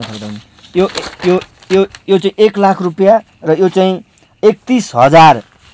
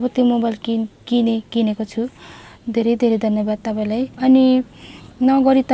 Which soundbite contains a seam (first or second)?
second